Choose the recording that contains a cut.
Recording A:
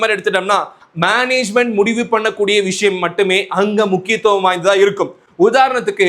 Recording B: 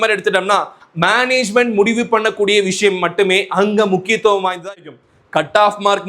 B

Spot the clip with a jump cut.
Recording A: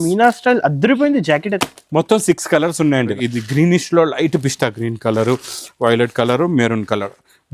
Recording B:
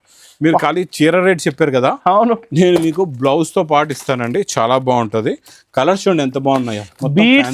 A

